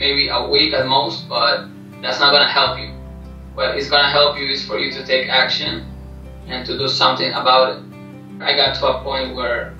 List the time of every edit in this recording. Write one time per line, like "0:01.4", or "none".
0:08.4